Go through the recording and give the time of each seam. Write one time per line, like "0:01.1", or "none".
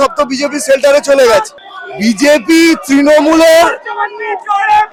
none